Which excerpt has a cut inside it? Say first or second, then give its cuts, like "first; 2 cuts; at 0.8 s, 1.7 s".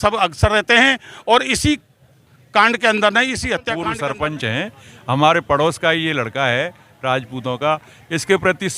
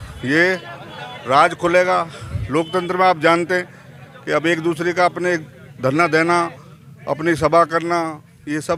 first; 1 cut; at 3.7 s